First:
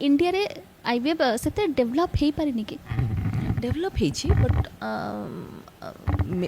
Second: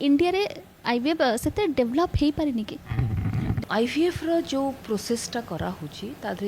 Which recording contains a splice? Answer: second; 1 cut; at 3.6 s

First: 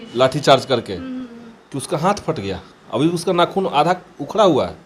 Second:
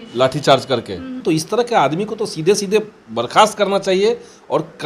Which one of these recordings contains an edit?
second; 1 cut; at 1.2 s

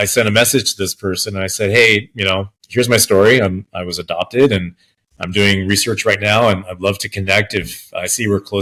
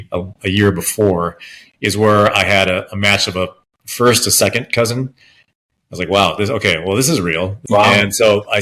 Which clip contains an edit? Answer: second; 1 cut; at 7.6 s

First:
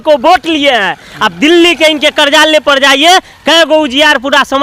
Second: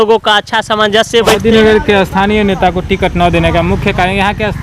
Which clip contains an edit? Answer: second; 1 cut; at 1.4 s

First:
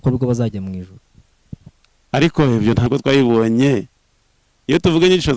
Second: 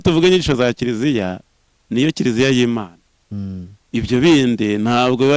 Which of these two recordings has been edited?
first; 1 cut; at 2.9 s

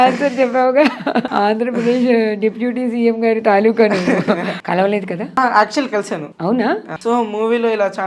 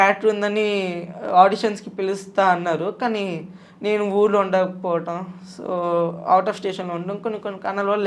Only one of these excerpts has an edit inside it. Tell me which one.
first; 5 cuts; at 1.3 s, 4.5 s, 5.4 s, 6.3 s, 6.9 s

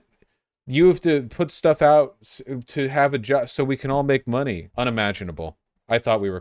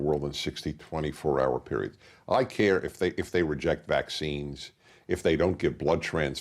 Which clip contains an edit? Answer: first; 1 cut; at 4.7 s

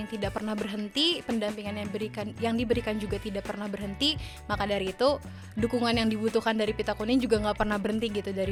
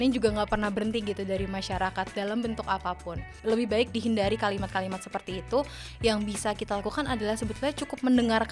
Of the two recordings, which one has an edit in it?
second; 1 cut; at 3.3 s

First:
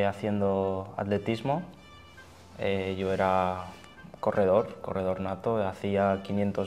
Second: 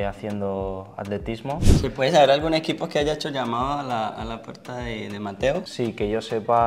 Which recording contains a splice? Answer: second; 2 cuts; at 1.7 s, 5.7 s

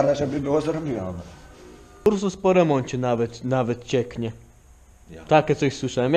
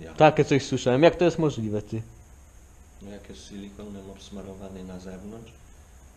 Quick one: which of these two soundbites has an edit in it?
first; 1 cut; at 2.1 s

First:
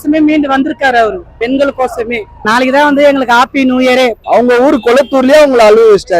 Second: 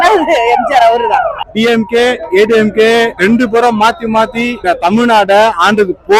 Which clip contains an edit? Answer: first; 1 cut; at 4.2 s

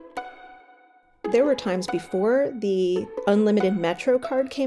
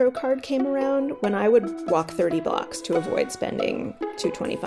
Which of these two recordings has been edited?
first; 2 cuts; at 1.3 s, 3.1 s

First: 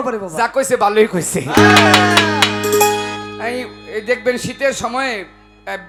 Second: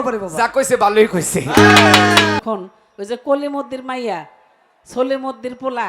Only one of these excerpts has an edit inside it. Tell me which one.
second; 1 cut; at 2.4 s

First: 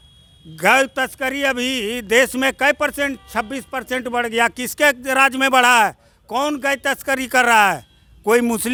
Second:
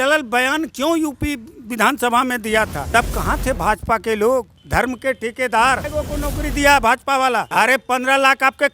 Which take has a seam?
second; 4 cuts; at 2.8 s, 4.6 s, 5.8 s, 7.5 s

